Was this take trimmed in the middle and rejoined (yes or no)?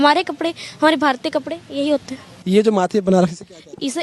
yes